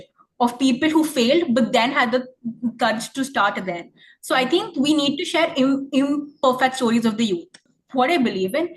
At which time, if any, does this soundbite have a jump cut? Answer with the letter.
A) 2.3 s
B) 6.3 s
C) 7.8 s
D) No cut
C